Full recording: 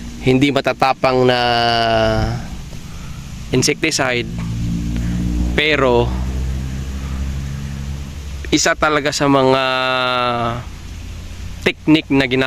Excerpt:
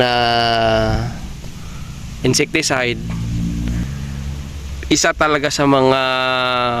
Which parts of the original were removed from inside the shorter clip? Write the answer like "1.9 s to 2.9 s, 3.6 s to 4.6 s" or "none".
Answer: 5.1 s to 7.5 s